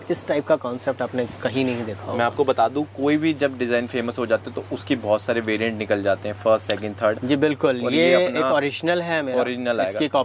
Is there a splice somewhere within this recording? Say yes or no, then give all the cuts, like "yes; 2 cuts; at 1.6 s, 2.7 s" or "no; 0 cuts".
no; 0 cuts